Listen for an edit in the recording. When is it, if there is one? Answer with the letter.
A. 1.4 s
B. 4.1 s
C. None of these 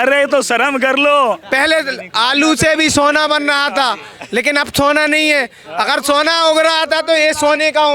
A